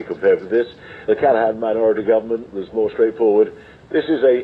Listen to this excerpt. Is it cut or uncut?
cut